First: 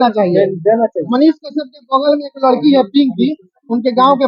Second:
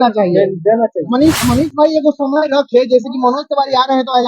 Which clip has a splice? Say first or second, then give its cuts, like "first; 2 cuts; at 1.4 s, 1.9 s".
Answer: second; 1 cut; at 1.4 s